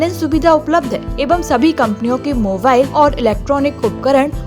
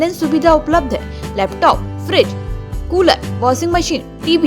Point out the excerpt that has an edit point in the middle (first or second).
first